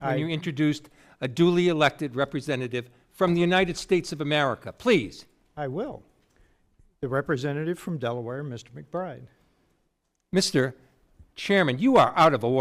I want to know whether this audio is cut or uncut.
uncut